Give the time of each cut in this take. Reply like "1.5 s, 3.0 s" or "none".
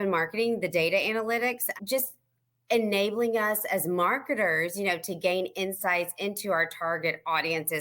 1.7 s